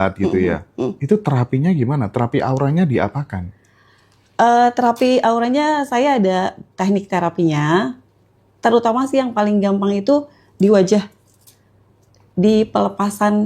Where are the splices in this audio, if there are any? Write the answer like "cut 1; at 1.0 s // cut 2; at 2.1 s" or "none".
none